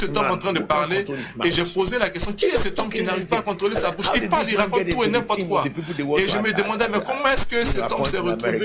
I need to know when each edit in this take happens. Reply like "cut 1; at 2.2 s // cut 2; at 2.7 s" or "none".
none